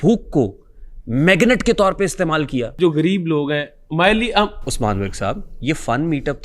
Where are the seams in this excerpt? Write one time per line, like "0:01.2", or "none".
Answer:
0:02.7